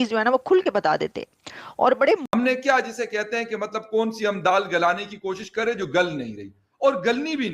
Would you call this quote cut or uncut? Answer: cut